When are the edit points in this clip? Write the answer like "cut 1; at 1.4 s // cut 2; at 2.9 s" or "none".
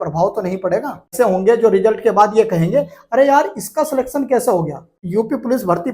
cut 1; at 1.1 s // cut 2; at 4.9 s